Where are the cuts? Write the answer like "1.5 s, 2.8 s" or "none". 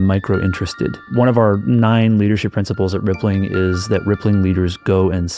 1.0 s